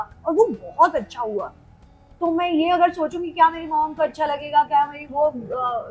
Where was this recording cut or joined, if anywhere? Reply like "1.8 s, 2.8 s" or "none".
none